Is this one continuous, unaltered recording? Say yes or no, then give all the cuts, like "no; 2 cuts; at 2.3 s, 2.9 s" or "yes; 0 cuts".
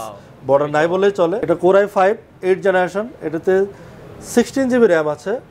no; 1 cut; at 1.4 s